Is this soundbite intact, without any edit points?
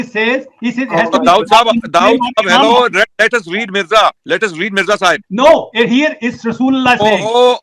yes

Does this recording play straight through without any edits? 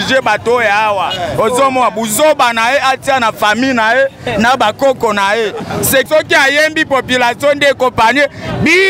no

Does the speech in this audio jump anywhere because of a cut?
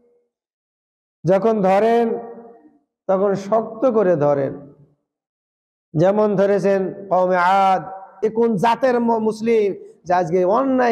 yes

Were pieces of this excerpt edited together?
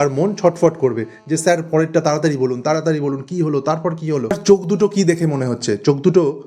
yes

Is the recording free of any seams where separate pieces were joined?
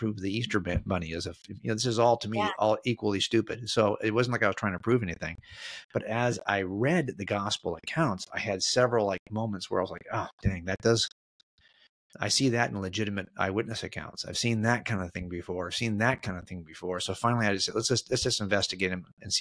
yes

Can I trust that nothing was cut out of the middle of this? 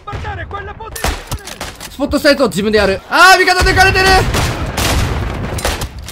no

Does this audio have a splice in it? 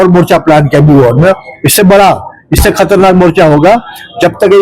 no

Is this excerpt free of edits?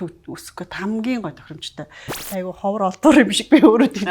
no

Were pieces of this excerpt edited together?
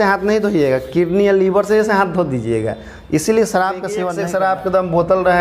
yes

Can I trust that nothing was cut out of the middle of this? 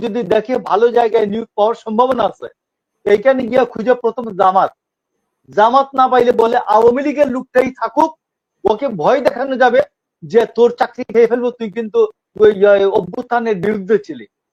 yes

